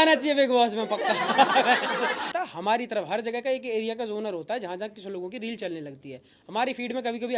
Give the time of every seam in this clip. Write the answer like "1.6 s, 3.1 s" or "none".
2.3 s